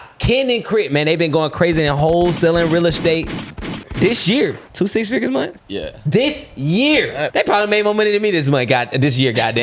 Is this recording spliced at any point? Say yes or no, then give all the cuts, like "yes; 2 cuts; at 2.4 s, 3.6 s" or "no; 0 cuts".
yes; 3 cuts; at 4.6 s, 5.6 s, 7.3 s